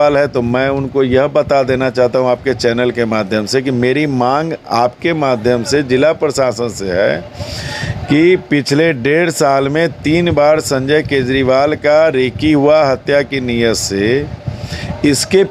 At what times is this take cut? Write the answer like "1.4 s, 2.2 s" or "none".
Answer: none